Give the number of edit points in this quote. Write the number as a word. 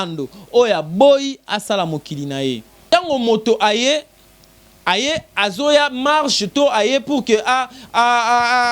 one